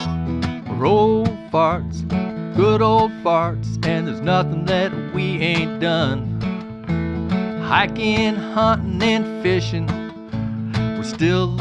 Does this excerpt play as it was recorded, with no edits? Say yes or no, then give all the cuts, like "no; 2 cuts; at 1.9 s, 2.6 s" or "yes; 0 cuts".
yes; 0 cuts